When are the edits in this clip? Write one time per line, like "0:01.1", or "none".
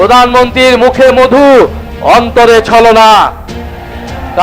none